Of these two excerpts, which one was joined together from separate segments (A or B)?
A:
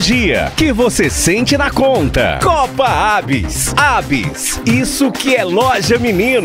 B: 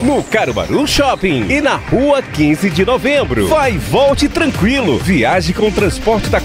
B